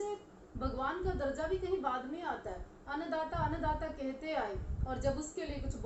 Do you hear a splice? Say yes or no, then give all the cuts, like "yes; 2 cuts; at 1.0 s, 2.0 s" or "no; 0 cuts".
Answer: no; 0 cuts